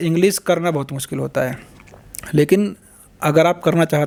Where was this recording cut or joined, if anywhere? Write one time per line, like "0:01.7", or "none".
none